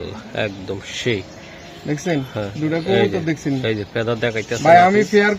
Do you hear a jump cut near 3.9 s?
no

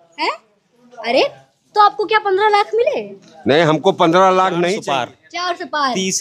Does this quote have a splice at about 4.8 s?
yes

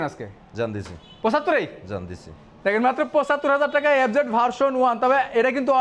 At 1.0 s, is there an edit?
no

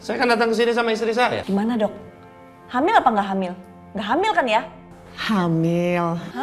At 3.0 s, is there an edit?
no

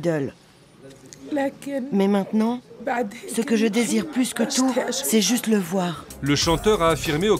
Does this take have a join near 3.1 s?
no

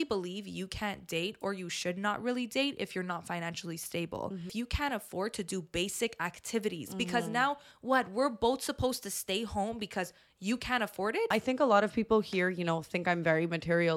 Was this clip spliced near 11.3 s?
yes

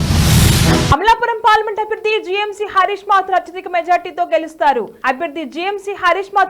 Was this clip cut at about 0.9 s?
yes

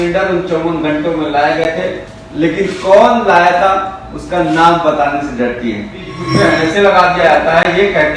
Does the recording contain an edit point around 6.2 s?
yes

